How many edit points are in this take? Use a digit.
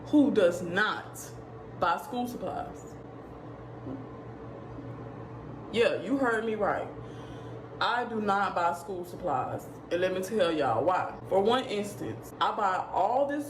0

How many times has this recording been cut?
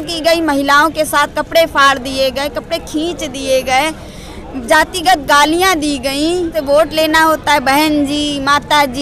1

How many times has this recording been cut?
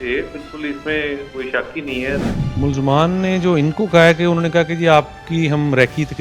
1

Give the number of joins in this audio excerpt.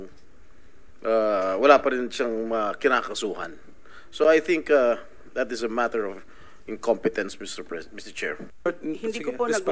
1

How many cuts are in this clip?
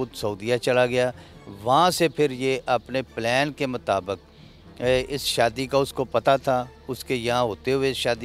0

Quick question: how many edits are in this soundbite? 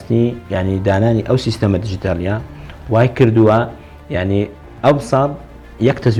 0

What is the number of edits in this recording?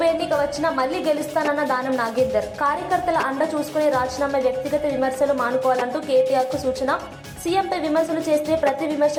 0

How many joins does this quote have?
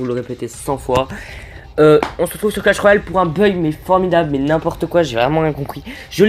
0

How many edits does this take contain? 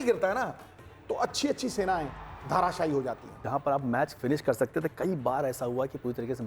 1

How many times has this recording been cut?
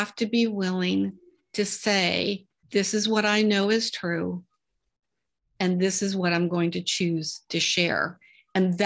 1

